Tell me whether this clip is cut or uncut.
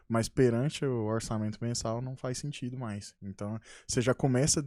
uncut